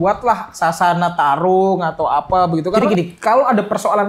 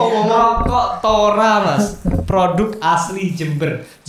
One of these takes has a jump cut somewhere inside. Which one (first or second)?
first